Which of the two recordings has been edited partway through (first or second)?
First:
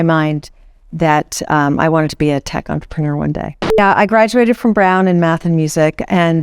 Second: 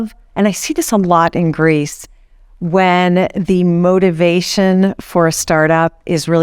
first